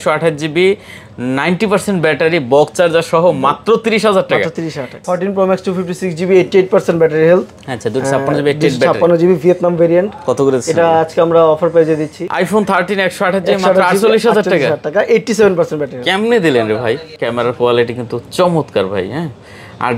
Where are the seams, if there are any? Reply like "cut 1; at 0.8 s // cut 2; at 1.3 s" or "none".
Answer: cut 1; at 5.0 s // cut 2; at 12.2 s // cut 3; at 17.2 s